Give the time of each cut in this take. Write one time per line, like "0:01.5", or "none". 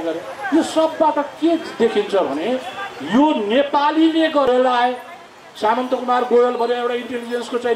0:04.5